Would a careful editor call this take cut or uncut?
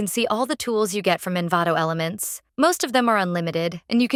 uncut